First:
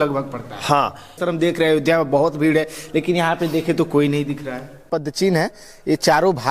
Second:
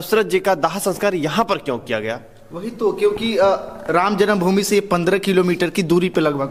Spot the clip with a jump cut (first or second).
first